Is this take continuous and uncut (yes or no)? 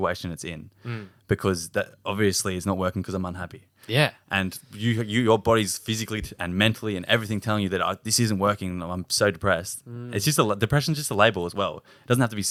yes